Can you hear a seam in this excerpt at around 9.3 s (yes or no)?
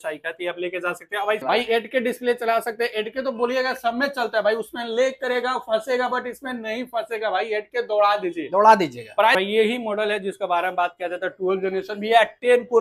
yes